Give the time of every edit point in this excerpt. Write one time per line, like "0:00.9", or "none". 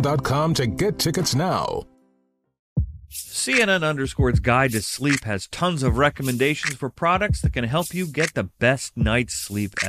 0:02.6